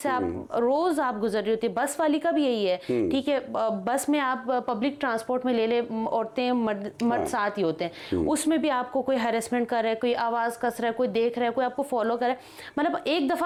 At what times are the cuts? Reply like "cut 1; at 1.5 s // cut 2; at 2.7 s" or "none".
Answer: none